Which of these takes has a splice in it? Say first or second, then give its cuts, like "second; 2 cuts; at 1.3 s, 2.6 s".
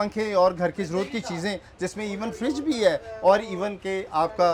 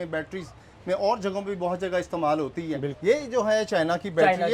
second; 1 cut; at 2.9 s